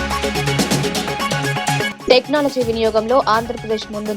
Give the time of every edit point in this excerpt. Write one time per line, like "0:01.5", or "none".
0:01.9